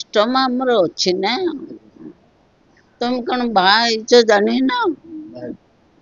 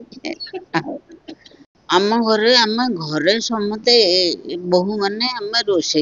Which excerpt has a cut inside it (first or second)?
second